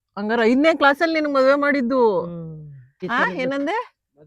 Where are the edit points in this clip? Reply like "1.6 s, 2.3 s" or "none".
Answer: 3.0 s